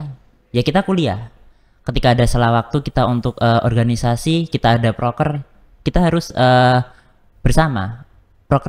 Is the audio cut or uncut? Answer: uncut